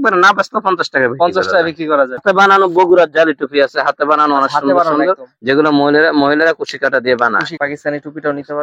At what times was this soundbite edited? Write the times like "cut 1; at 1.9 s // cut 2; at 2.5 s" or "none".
cut 1; at 2.2 s // cut 2; at 7.5 s